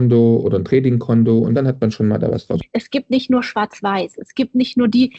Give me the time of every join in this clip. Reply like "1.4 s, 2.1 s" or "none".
2.6 s